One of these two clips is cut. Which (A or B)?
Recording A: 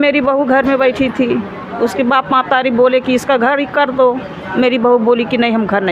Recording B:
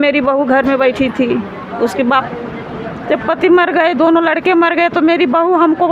B